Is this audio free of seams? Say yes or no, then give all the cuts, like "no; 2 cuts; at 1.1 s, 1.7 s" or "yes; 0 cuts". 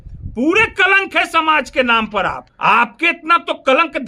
no; 1 cut; at 2.5 s